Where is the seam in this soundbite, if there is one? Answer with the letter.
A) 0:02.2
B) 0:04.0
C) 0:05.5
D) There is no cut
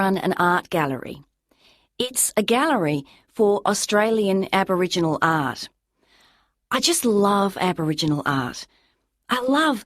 A